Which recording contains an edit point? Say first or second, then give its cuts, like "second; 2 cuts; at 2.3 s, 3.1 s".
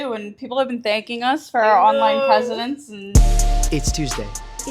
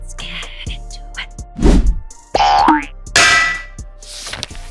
first; 1 cut; at 3.1 s